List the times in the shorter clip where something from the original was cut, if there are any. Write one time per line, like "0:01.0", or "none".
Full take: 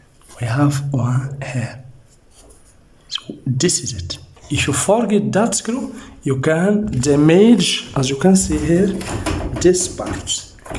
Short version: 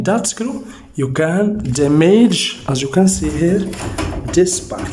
none